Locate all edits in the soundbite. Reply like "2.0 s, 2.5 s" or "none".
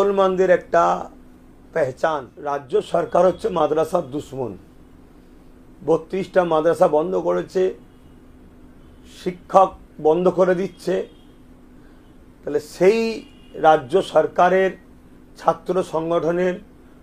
2.4 s